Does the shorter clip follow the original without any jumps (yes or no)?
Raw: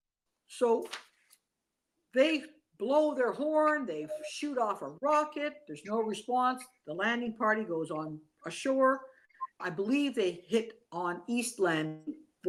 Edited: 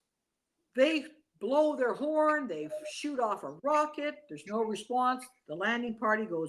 yes